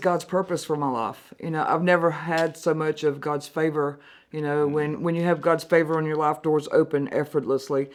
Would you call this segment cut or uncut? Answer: uncut